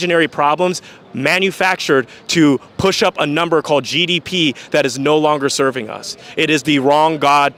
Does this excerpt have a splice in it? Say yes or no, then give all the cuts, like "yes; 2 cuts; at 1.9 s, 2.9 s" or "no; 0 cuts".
no; 0 cuts